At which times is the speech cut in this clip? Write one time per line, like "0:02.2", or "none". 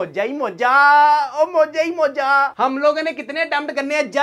0:02.5